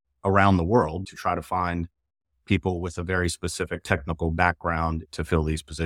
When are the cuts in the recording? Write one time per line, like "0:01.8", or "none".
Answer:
0:01.0
0:03.8
0:05.1